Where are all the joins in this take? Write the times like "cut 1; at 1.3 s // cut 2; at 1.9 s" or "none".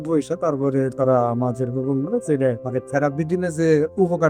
cut 1; at 2.6 s